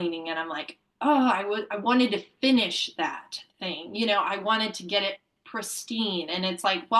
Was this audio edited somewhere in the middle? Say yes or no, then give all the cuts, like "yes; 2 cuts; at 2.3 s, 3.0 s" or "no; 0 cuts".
no; 0 cuts